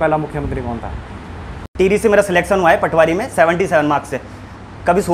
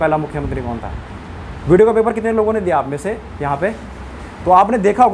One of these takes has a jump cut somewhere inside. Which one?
first; 1 cut; at 1.6 s

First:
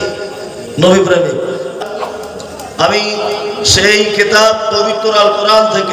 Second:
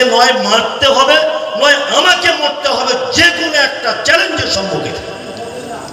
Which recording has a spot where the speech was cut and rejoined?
first; 1 cut; at 1.7 s

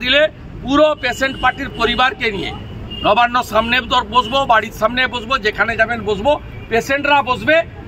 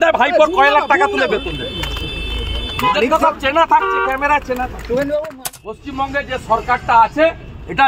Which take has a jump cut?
second; 1 cut; at 5.4 s

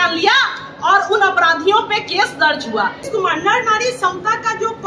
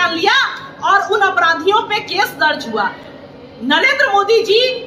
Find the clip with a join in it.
first; 1 cut; at 3.1 s

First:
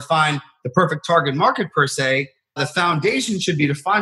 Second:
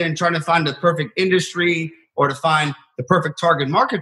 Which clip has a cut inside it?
first; 1 cut; at 2.6 s

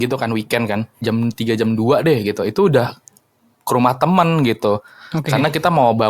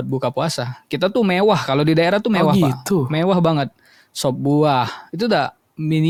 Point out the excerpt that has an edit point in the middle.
first; 1 cut; at 0.9 s

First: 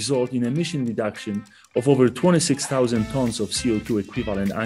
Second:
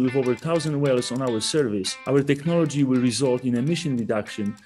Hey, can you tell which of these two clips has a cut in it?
second; 1 cut; at 1.9 s

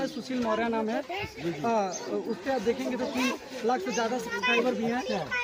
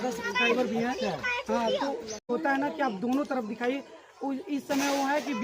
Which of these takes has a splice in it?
second; 1 cut; at 2.3 s

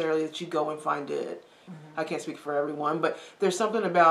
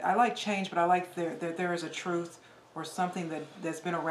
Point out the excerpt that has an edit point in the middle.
first; 1 cut; at 1.7 s

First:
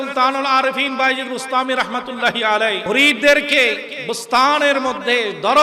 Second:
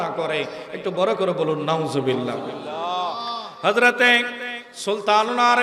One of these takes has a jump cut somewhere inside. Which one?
first; 1 cut; at 2.8 s

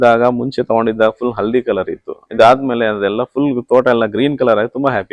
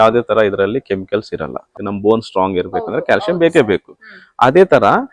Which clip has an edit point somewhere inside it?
second; 1 cut; at 1.7 s

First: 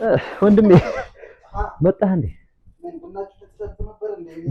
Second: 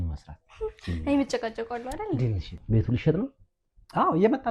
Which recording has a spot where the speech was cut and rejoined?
second; 1 cut; at 2.5 s

